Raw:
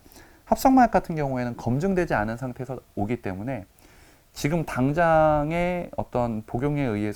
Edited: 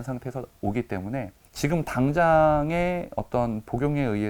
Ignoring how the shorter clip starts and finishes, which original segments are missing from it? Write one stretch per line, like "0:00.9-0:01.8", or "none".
0:03.8-0:04.2